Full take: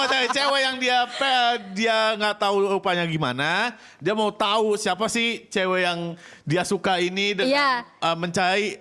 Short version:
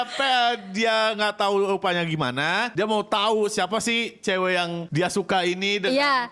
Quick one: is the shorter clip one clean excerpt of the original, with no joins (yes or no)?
no